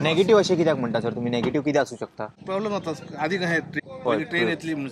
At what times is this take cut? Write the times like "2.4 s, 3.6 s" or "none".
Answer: 2.4 s, 3.7 s